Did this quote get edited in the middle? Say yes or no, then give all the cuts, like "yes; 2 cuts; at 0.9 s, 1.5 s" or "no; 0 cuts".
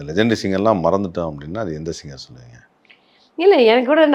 no; 0 cuts